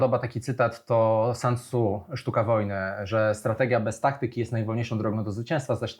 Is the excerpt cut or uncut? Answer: uncut